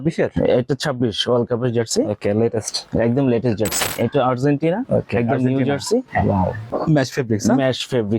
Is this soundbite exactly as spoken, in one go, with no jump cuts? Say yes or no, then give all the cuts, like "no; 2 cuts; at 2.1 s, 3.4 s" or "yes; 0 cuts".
no; 2 cuts; at 3.8 s, 6.6 s